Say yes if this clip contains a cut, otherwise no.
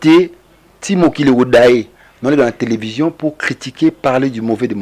no